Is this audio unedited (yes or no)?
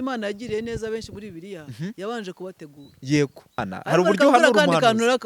no